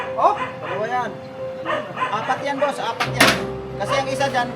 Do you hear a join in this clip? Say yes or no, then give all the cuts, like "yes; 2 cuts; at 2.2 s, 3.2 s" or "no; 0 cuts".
no; 0 cuts